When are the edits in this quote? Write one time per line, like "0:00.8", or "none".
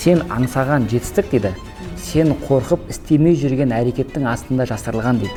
none

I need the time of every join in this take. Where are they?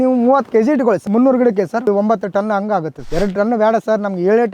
0:01.0
0:01.9
0:03.0

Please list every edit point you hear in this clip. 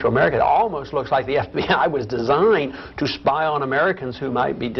none

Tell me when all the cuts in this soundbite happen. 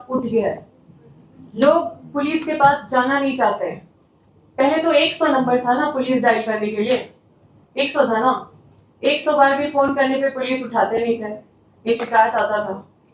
none

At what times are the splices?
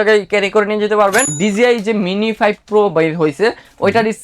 0:01.3

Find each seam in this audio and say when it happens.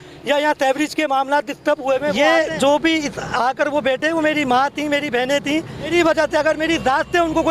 0:02.2
0:05.9

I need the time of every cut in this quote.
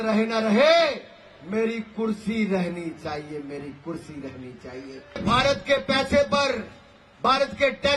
0:05.2

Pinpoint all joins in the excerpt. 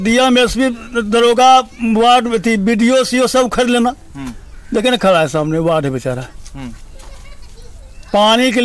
none

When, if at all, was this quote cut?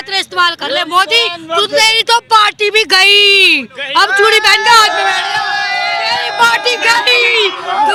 none

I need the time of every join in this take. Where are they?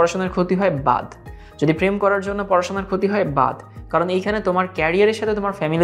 none

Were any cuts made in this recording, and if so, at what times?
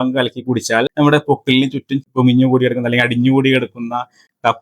none

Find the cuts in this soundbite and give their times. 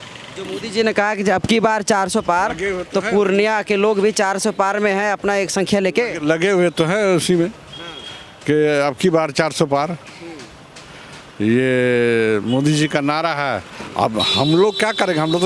none

